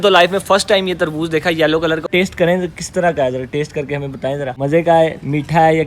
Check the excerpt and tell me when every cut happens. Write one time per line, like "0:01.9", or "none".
0:02.1
0:04.5